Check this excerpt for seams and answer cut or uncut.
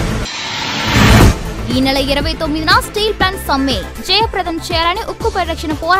cut